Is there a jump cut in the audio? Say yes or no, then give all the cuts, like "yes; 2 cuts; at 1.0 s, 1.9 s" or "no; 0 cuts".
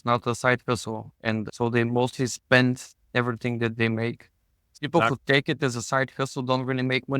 yes; 2 cuts; at 1.5 s, 4.7 s